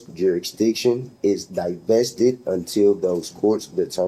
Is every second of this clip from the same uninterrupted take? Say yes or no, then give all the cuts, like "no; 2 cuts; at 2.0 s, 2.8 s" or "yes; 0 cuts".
yes; 0 cuts